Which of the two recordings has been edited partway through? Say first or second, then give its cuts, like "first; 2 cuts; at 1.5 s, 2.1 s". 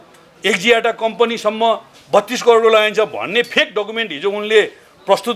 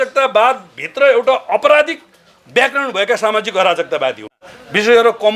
second; 1 cut; at 4.4 s